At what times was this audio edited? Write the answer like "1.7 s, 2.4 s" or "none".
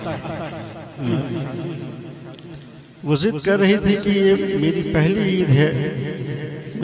1.0 s